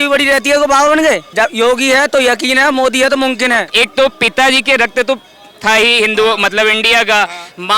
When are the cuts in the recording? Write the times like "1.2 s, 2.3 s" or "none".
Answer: 1.3 s, 3.7 s